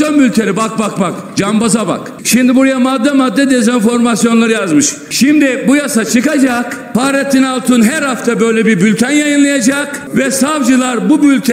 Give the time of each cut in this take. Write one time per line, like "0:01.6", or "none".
0:02.1
0:05.0
0:06.8
0:10.0